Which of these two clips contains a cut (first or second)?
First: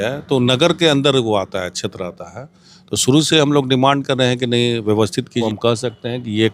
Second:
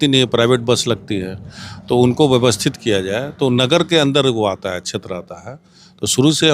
first